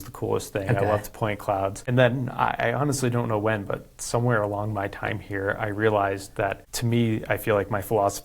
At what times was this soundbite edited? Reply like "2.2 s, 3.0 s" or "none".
1.8 s, 6.7 s